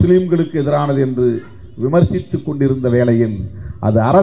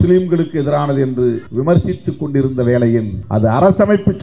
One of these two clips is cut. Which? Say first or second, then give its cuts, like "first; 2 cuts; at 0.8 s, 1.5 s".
second; 2 cuts; at 1.5 s, 3.2 s